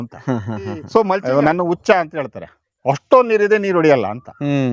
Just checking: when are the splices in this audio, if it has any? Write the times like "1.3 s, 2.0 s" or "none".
1.2 s